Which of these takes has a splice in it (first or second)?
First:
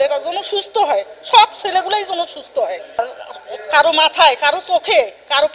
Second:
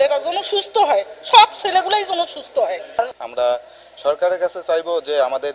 second